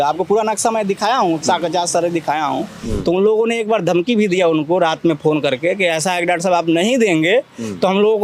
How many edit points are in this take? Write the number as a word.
one